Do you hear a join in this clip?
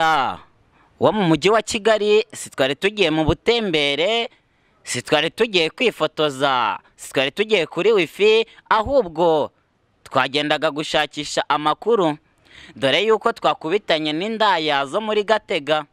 no; 0 cuts

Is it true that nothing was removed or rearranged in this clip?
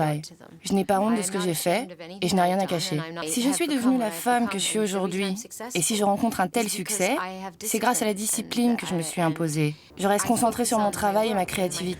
no; 2 cuts; at 3.3 s, 9.9 s

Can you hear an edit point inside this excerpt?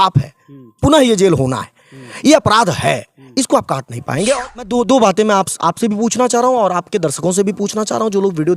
yes; 1 cut; at 4.7 s

